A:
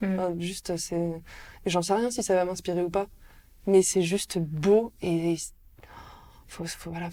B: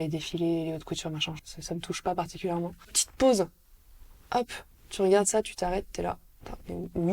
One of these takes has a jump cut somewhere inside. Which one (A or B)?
B